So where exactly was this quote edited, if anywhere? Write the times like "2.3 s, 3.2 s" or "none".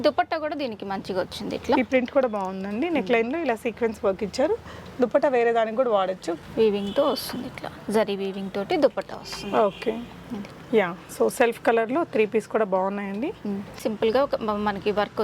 6.3 s, 13.8 s